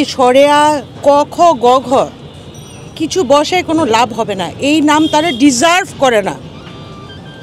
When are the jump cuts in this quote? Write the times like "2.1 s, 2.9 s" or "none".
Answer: none